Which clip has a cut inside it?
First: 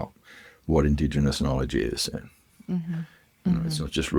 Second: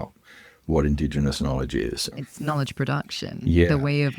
second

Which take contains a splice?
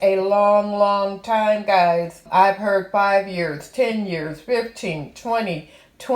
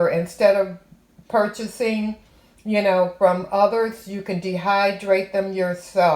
first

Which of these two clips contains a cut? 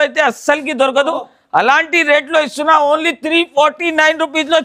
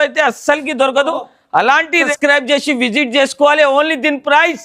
second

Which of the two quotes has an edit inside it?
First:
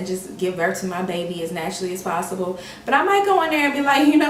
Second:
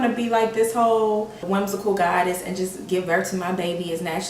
second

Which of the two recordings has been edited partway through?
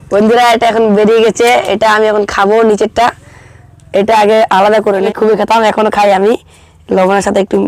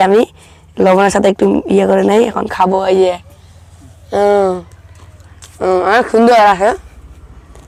first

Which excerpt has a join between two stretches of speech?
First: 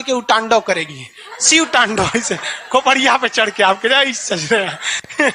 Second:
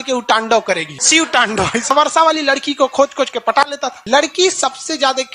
second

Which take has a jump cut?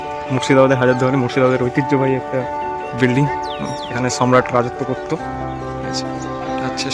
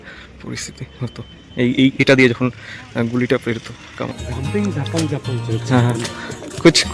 second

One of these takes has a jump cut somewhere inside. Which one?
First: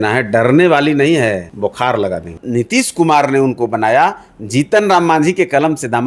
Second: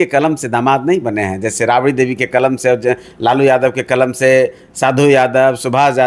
first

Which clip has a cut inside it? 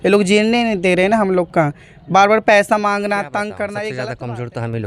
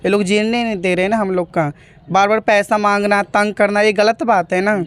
first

